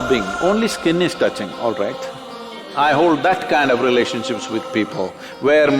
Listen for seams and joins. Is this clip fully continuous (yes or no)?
no